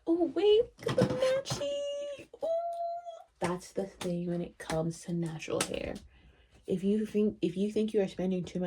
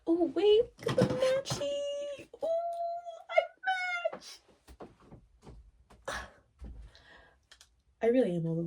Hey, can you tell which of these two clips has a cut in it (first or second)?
first